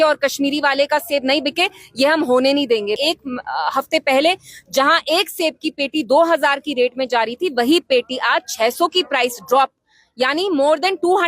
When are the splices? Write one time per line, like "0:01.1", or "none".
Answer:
0:03.0